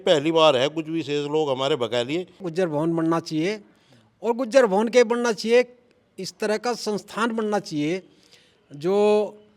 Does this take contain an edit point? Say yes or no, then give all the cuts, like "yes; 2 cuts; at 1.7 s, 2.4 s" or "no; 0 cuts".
yes; 1 cut; at 2.5 s